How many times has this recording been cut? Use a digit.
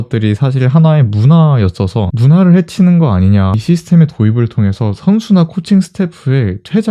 1